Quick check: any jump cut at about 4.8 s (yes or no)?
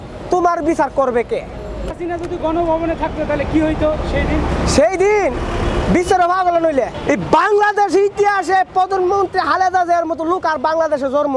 no